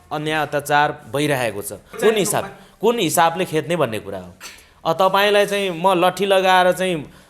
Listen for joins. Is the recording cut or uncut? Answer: cut